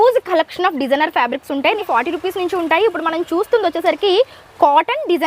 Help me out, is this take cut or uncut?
cut